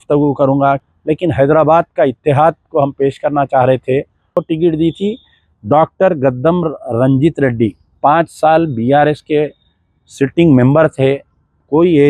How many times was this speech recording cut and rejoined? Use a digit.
2